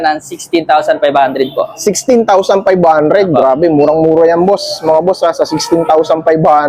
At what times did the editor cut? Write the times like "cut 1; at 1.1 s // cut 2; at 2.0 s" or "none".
none